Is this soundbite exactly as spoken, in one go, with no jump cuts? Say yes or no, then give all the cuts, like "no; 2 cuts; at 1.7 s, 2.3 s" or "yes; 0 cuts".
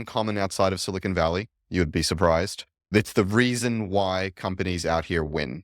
no; 1 cut; at 3.0 s